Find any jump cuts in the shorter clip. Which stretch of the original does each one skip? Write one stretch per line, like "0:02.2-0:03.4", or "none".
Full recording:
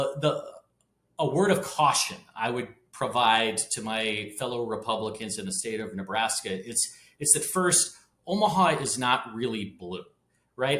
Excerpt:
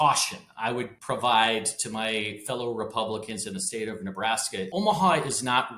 0:02.7-0:02.9
0:06.6-0:08.2